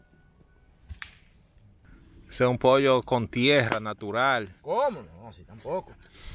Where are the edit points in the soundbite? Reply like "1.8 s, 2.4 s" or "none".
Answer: 1.8 s